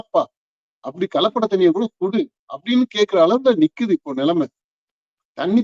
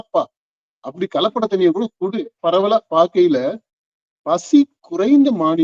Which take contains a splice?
second; 1 cut; at 2.3 s

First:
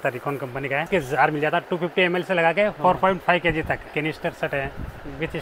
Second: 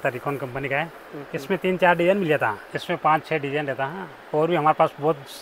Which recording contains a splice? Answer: first; 3 cuts; at 0.9 s, 2.8 s, 3.9 s

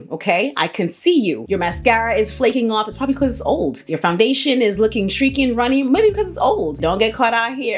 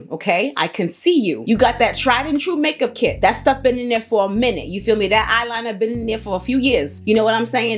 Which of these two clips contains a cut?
first; 2 cuts; at 1.4 s, 6.7 s

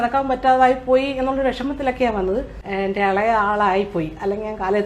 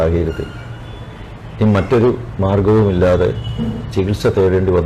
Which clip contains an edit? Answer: first; 1 cut; at 2.6 s

